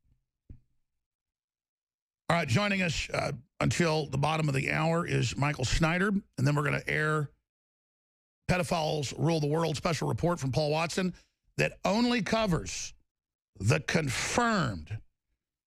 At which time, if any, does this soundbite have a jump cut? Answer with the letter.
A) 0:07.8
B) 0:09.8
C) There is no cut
B